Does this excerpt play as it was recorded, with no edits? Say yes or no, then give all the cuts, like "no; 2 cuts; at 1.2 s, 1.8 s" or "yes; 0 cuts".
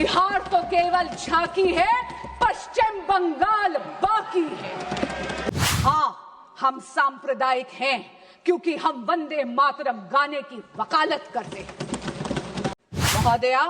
no; 2 cuts; at 5.5 s, 12.8 s